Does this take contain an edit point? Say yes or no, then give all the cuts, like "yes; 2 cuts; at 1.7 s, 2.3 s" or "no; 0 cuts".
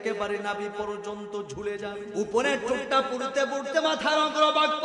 yes; 1 cut; at 2.1 s